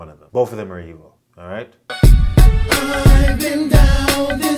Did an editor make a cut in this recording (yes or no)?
yes